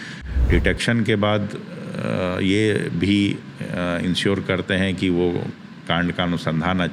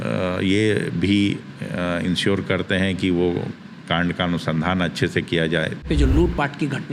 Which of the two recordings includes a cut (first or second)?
second